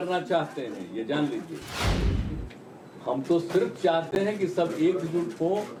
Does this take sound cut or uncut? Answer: uncut